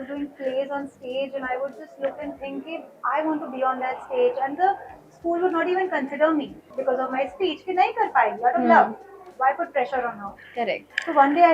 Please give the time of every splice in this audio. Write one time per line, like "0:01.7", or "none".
none